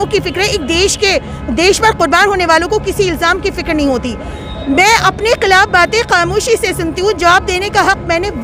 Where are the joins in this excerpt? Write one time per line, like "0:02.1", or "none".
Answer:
none